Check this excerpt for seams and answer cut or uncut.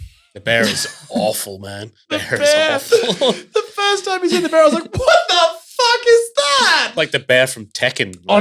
cut